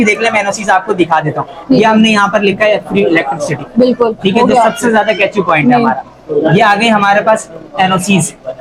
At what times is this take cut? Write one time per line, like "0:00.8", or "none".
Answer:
none